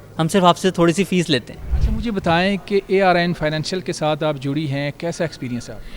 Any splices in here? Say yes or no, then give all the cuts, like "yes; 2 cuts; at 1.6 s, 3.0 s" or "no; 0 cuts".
no; 0 cuts